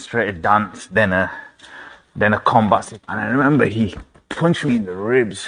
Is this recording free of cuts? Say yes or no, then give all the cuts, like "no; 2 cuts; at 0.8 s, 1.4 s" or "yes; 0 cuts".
no; 1 cut; at 3.0 s